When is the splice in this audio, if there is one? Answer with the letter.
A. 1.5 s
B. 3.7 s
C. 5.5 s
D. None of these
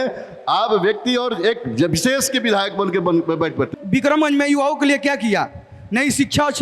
B